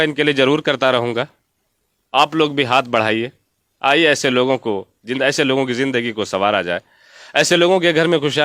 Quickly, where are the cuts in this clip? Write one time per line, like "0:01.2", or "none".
none